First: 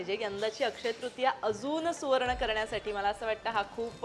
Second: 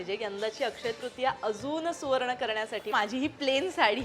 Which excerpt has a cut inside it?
second; 1 cut; at 2.9 s

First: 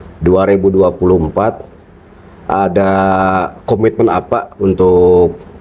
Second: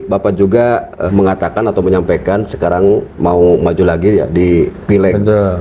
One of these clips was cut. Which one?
second; 1 cut; at 1.0 s

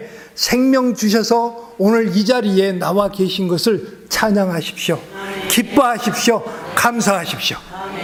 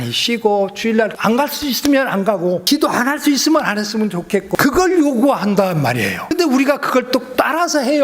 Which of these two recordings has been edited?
second; 5 cuts; at 1.1 s, 2.6 s, 4.6 s, 6.3 s, 7.3 s

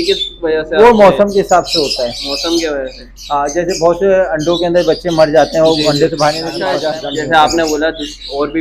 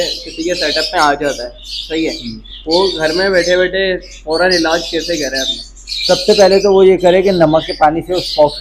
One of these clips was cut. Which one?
first; 1 cut; at 6.7 s

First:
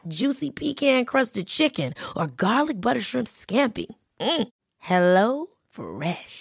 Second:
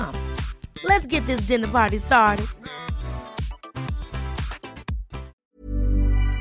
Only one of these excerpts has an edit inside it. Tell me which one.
second; 1 cut; at 5.3 s

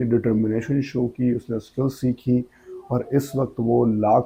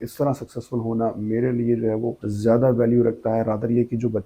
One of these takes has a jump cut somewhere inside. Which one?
second; 1 cut; at 2.2 s

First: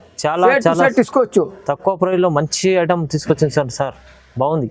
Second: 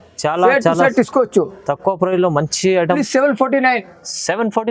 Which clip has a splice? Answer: second; 1 cut; at 3.0 s

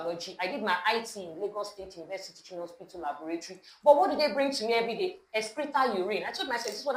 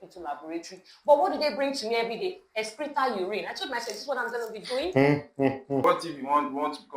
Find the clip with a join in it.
second; 1 cut; at 5.8 s

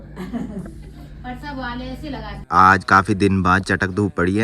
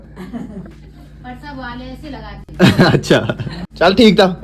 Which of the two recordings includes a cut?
first; 1 cut; at 2.5 s

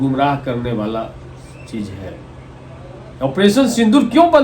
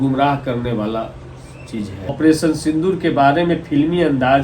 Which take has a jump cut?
second; 1 cut; at 2.1 s

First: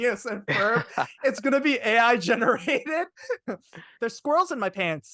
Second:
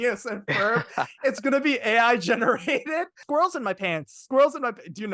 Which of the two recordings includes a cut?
second; 1 cut; at 3.2 s

